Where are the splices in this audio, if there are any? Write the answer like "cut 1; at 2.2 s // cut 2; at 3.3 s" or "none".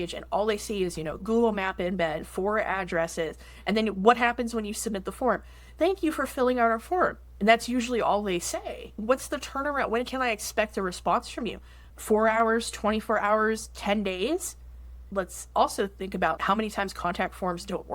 cut 1; at 1.2 s // cut 2; at 9.0 s // cut 3; at 15.0 s // cut 4; at 16.4 s

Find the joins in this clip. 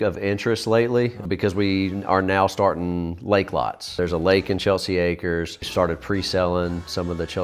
cut 1; at 1.2 s // cut 2; at 3.9 s // cut 3; at 5.7 s

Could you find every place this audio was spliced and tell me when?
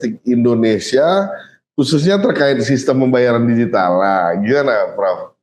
none

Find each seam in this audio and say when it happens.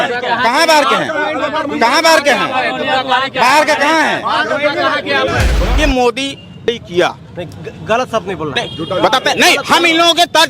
cut 1; at 5.5 s

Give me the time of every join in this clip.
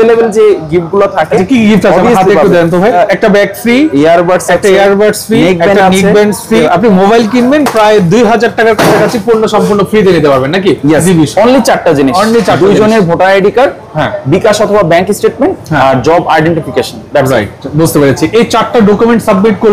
cut 1; at 2.9 s // cut 2; at 6.6 s // cut 3; at 10.8 s

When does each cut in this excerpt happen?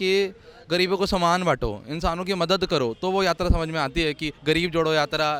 none

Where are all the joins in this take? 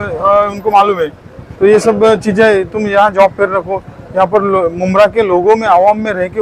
none

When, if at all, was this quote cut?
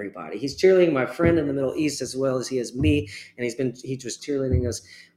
cut 1; at 4.2 s

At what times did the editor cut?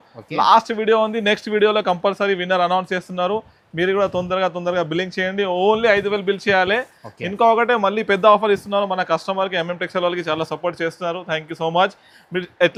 none

